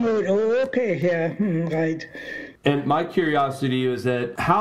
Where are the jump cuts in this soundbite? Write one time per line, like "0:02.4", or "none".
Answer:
0:02.6